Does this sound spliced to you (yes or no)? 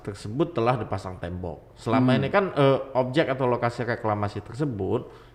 no